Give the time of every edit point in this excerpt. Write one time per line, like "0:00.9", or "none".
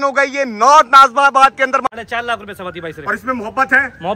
0:01.9